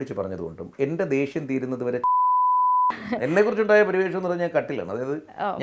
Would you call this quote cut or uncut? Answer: cut